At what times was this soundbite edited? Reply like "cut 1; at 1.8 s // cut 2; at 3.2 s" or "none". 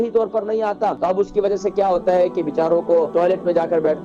cut 1; at 1.0 s // cut 2; at 3.1 s